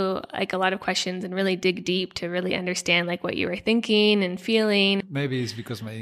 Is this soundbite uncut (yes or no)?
no